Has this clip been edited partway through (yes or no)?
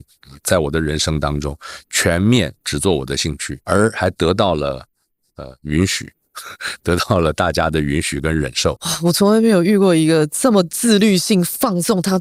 no